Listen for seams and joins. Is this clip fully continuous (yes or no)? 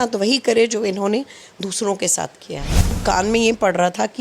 no